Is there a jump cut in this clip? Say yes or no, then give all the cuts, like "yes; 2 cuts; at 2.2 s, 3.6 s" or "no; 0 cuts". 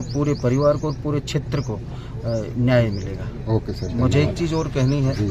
no; 0 cuts